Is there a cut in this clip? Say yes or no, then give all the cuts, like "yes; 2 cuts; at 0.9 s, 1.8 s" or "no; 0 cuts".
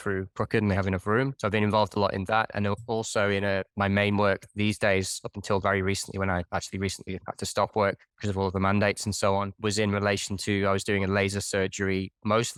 no; 0 cuts